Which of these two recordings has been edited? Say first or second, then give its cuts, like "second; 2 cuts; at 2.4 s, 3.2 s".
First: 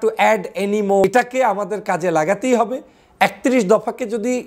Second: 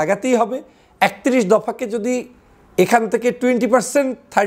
first; 1 cut; at 1.0 s